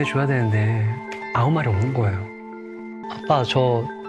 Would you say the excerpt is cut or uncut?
cut